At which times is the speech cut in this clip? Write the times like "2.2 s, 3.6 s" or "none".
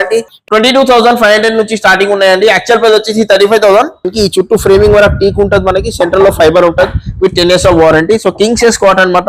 4.1 s